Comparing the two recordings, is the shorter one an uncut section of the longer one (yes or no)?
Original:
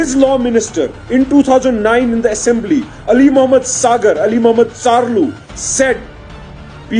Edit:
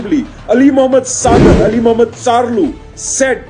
yes